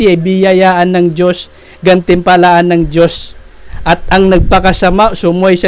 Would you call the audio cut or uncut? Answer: uncut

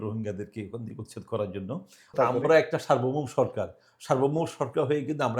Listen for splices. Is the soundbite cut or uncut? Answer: cut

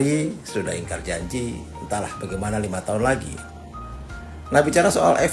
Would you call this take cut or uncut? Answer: uncut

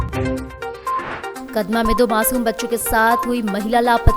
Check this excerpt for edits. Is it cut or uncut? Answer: cut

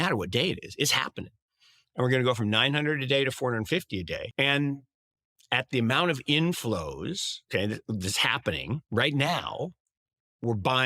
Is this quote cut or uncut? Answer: cut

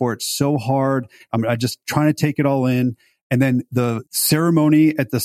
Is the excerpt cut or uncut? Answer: cut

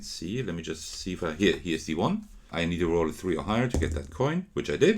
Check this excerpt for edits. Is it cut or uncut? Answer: cut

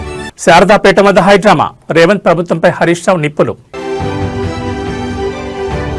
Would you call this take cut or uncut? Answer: uncut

